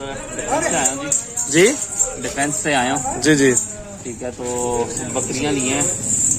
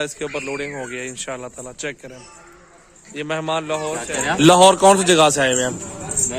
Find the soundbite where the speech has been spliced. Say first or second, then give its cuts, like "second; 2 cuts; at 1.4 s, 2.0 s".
second; 1 cut; at 4.1 s